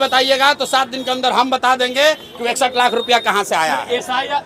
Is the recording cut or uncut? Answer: uncut